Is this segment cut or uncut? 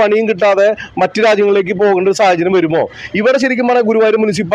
uncut